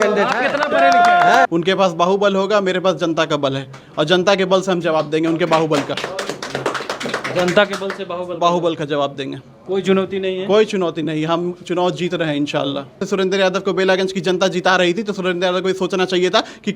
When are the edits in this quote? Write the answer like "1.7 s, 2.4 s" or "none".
1.5 s, 13.0 s